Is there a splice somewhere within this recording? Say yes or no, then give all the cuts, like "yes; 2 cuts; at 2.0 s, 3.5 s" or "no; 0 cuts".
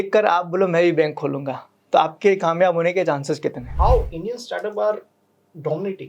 yes; 1 cut; at 3.6 s